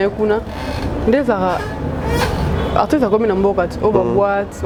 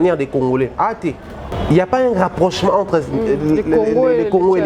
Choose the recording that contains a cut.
second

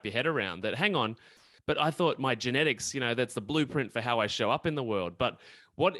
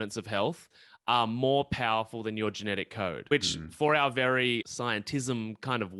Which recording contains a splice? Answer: second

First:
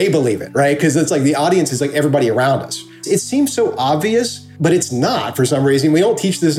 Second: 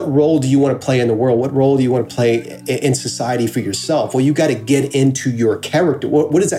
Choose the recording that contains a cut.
first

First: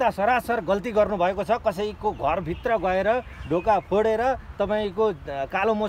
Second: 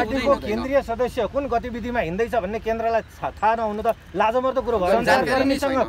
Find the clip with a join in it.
second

